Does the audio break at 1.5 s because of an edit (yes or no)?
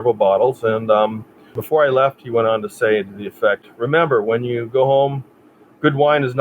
yes